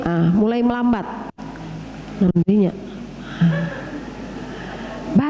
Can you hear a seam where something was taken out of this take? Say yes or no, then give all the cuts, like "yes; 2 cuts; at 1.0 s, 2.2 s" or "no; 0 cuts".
no; 0 cuts